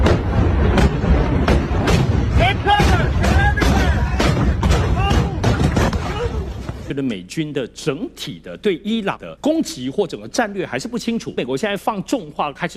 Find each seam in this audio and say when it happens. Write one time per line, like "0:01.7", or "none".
0:06.8
0:09.3
0:11.4